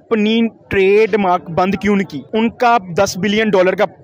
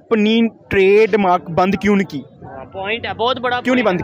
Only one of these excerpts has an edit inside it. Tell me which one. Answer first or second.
first